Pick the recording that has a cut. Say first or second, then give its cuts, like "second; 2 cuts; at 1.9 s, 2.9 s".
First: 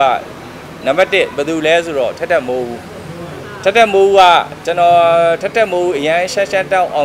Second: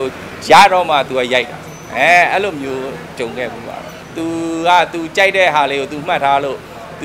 second; 1 cut; at 3.9 s